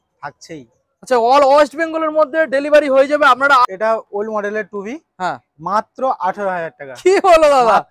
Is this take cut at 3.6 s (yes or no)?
yes